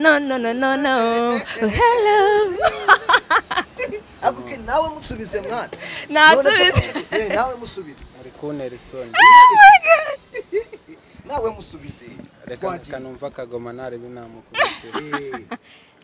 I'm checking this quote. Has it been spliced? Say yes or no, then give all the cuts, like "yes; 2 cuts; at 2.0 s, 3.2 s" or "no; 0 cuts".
no; 0 cuts